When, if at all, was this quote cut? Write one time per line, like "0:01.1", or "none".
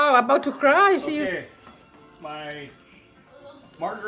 0:01.3